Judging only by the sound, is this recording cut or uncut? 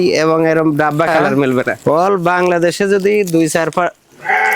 cut